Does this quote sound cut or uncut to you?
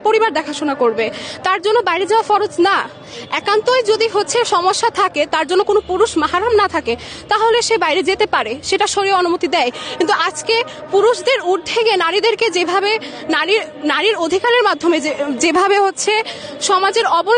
uncut